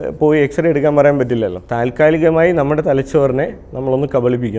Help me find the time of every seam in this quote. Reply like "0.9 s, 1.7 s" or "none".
1.6 s